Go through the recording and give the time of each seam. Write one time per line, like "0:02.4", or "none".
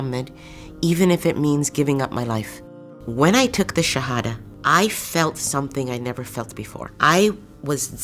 0:02.7